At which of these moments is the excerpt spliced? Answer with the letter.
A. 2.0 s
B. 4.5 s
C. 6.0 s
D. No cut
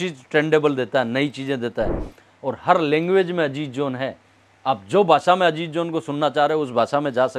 D